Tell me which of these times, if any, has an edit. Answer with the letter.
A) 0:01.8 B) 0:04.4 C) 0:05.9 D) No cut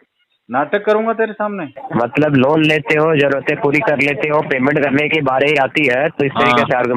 A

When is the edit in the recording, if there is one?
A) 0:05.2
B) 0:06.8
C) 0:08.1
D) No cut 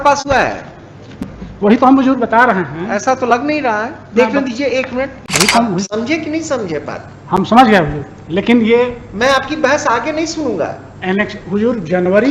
A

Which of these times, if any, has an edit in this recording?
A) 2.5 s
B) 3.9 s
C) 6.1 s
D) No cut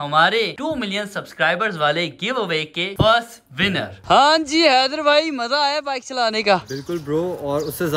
B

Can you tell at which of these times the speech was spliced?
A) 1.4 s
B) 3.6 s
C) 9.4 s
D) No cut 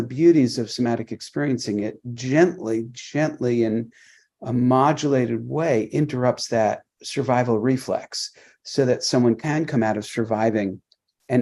C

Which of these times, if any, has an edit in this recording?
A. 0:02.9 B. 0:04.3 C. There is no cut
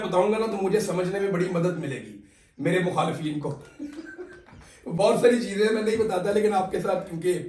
C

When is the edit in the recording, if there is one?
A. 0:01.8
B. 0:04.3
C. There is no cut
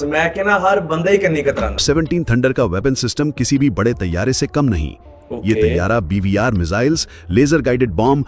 A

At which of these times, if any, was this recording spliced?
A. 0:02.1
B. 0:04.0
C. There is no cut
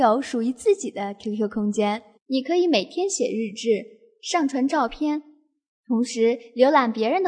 A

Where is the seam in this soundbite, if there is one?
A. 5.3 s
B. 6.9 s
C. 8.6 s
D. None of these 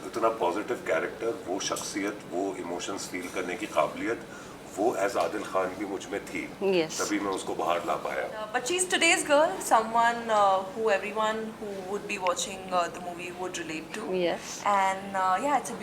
C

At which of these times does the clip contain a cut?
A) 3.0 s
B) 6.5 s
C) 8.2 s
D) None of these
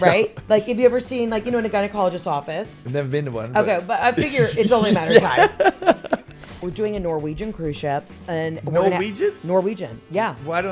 B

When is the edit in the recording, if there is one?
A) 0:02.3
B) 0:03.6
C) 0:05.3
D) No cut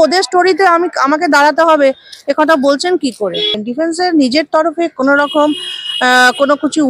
B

